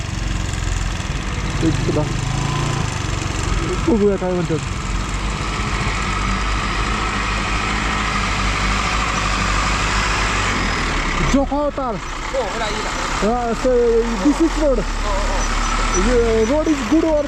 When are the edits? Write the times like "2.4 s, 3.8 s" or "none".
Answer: none